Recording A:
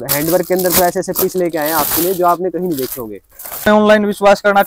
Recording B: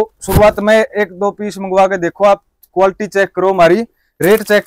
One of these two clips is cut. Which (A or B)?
A